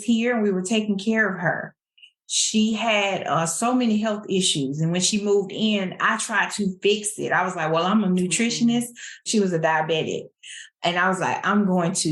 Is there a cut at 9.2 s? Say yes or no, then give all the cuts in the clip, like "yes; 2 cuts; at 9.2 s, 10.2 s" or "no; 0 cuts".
yes; 1 cut; at 9.2 s